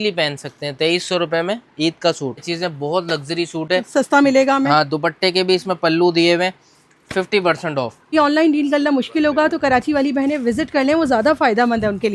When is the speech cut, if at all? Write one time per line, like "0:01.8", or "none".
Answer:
0:02.4
0:08.1